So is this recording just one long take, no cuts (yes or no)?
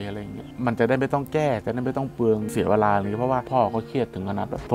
no